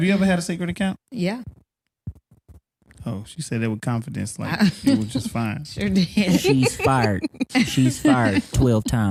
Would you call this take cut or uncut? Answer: uncut